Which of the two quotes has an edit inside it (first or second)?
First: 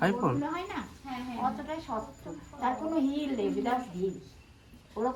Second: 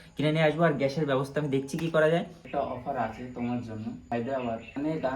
second